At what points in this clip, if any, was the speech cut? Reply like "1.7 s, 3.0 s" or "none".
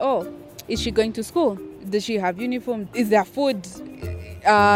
1.7 s